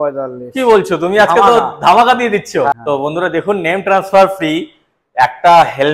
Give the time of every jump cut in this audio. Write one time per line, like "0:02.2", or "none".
0:02.7

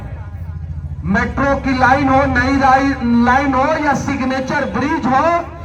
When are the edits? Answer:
none

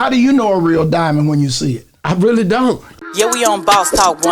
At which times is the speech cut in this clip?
0:02.9

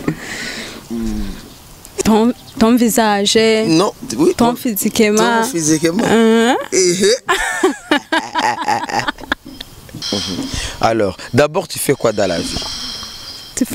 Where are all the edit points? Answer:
0:02.0
0:09.9

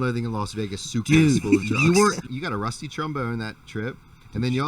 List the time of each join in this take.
0:02.3

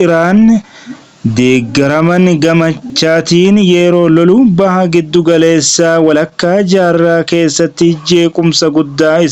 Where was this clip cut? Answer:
0:02.9

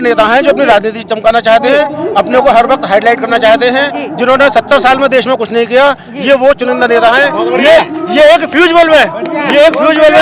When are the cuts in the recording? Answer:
none

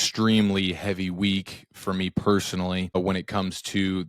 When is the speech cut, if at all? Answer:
0:03.0

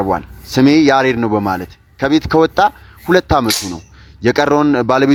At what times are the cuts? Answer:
none

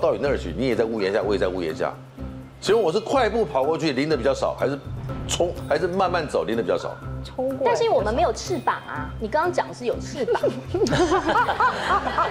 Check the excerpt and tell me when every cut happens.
none

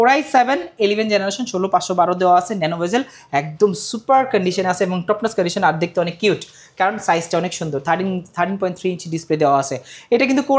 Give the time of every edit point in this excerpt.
none

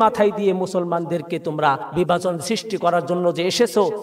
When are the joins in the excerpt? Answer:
0:01.9

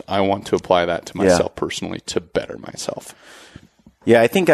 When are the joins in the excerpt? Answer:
none

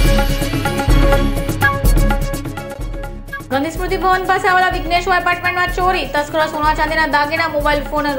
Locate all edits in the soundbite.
none

